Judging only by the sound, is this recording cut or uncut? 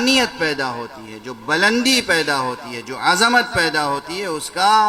uncut